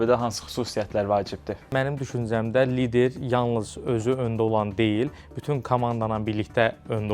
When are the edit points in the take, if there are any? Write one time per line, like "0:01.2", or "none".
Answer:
0:01.7

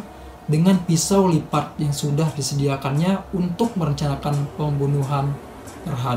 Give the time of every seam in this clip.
none

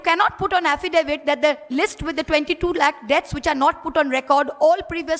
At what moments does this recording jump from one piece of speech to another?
none

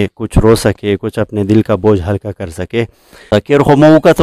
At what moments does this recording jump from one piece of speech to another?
0:03.3

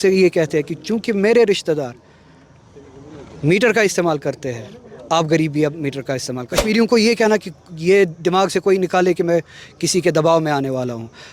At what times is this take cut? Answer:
0:06.5

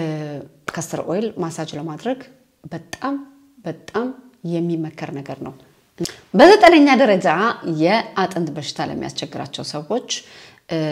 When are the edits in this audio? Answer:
none

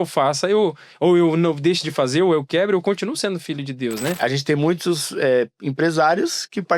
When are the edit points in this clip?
0:04.2

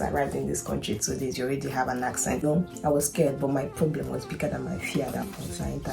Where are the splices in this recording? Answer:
0:02.4

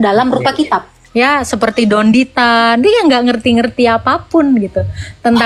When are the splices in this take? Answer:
0:01.0

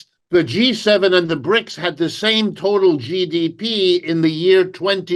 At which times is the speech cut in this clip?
none

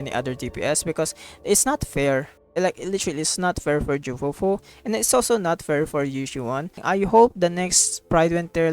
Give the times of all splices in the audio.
0:06.8

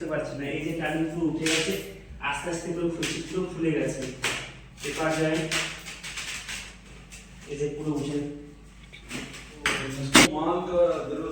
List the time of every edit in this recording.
0:10.3

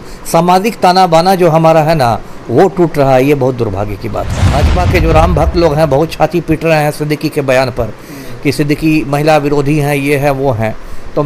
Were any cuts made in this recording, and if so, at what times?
0:04.5

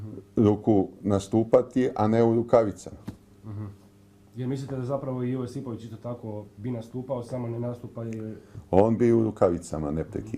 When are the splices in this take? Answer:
0:03.6

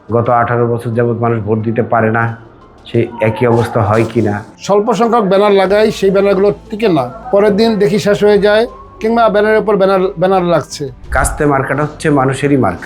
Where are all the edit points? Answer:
0:04.5
0:07.2
0:11.0

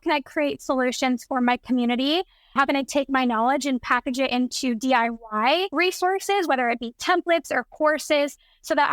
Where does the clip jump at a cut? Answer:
0:02.5
0:05.7

